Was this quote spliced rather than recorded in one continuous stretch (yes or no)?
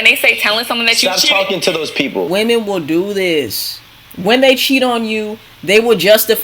yes